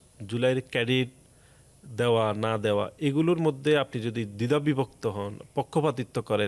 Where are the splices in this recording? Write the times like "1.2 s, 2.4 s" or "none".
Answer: none